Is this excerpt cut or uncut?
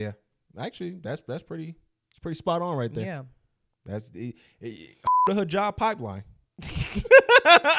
uncut